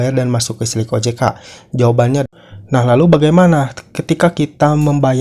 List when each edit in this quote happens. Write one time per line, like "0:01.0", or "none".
0:02.2